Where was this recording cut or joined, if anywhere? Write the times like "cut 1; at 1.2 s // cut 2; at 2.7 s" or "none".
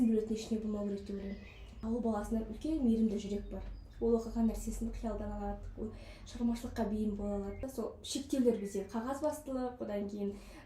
cut 1; at 1.8 s // cut 2; at 7.6 s